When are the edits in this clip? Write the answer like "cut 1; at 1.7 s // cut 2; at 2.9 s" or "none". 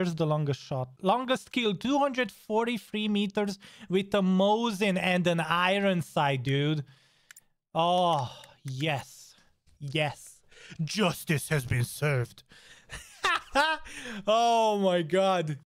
cut 1; at 0.9 s